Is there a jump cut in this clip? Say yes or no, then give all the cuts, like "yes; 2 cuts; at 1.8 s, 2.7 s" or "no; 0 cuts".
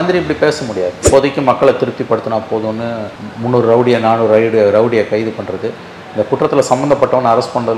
yes; 1 cut; at 1.0 s